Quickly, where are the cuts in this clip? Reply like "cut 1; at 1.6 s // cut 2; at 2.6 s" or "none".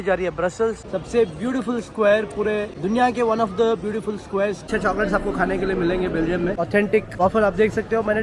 cut 1; at 0.8 s // cut 2; at 2.7 s // cut 3; at 4.6 s // cut 4; at 6.8 s